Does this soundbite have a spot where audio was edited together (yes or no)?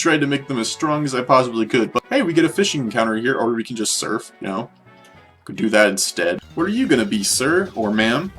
yes